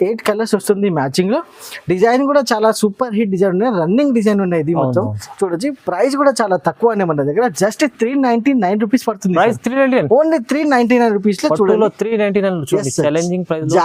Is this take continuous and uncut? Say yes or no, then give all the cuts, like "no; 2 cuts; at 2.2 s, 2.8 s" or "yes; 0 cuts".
yes; 0 cuts